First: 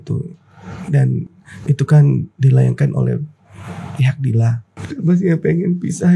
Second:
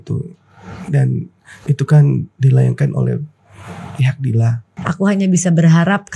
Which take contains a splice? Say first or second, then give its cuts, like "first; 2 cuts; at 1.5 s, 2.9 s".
first; 1 cut; at 4.6 s